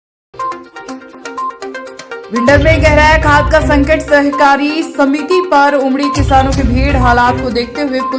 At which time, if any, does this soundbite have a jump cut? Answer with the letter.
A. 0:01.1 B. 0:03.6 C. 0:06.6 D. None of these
D